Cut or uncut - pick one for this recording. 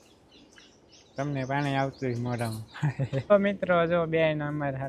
cut